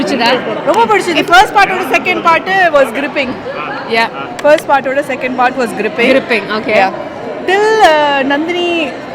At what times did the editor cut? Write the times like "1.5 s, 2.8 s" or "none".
none